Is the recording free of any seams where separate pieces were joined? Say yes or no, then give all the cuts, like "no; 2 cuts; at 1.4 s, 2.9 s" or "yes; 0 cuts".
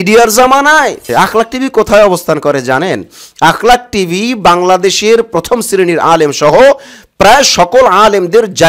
no; 1 cut; at 1.0 s